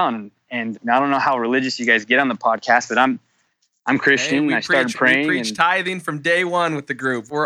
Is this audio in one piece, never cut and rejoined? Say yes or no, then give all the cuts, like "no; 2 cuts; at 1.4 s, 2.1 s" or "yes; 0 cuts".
yes; 0 cuts